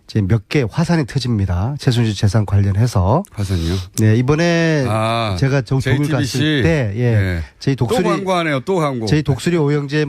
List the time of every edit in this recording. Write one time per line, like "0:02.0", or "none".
0:02.3